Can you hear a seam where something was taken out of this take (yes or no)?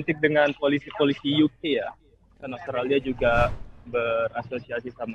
no